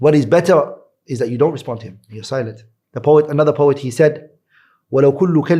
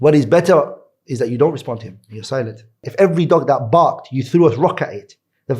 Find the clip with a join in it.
second; 1 cut; at 2.9 s

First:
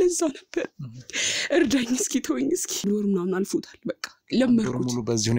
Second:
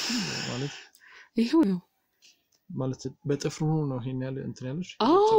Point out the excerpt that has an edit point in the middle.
first; 1 cut; at 2.9 s

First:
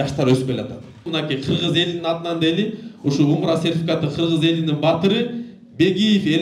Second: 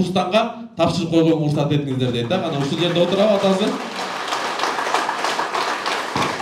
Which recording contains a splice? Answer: first; 1 cut; at 1.1 s

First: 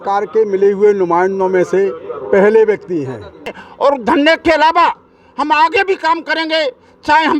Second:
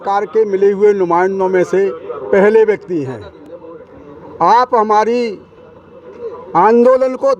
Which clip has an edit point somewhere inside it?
first; 1 cut; at 3.6 s

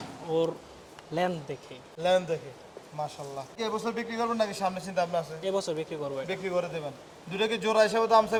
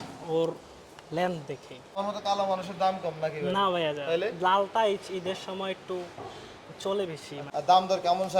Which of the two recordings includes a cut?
second; 2 cuts; at 1.9 s, 7.3 s

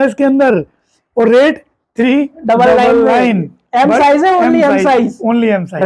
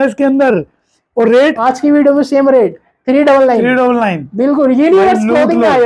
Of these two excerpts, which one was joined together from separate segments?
second; 1 cut; at 1.6 s

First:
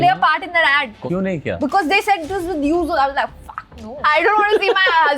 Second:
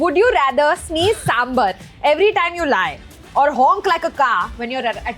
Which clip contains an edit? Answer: first; 2 cuts; at 1.0 s, 4.0 s

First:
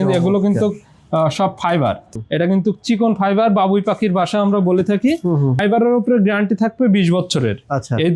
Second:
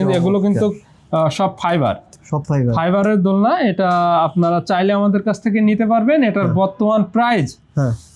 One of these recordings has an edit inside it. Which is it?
first; 2 cuts; at 2.2 s, 5.6 s

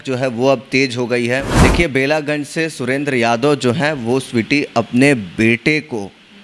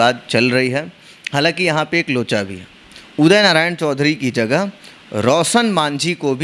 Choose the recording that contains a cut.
first; 1 cut; at 1.5 s

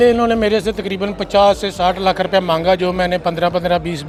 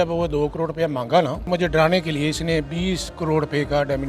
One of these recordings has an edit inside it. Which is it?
second; 1 cut; at 1.5 s

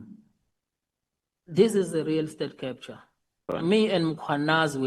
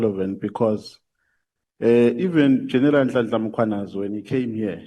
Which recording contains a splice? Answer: first; 1 cut; at 3.5 s

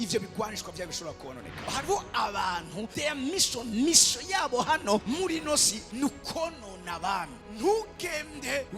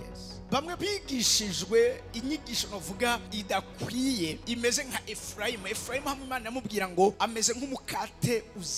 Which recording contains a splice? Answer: first; 2 cuts; at 1.6 s, 5.9 s

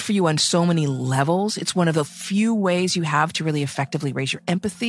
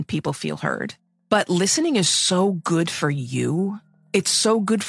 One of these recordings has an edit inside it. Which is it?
second; 2 cuts; at 1.1 s, 3.9 s

